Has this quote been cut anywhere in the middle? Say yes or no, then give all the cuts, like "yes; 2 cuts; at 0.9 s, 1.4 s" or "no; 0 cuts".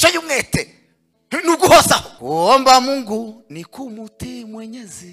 yes; 1 cut; at 2.1 s